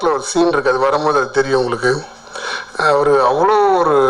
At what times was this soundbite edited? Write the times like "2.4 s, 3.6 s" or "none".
none